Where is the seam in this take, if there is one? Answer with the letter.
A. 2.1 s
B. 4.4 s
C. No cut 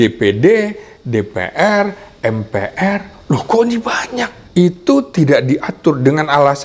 B